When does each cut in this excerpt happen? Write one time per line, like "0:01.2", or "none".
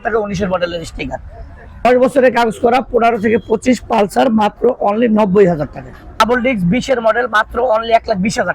0:01.9
0:06.2